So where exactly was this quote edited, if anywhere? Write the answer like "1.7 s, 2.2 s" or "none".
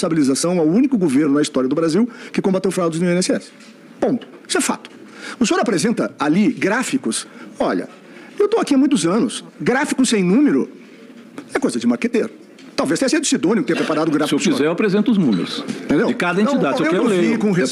none